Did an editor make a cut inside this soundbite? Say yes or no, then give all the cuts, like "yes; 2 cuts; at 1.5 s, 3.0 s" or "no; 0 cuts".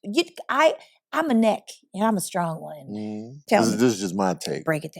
yes; 1 cut; at 3.4 s